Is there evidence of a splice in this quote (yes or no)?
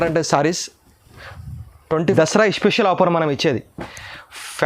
yes